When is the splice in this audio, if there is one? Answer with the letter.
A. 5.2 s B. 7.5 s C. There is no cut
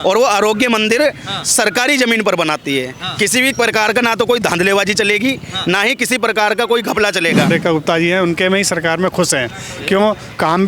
B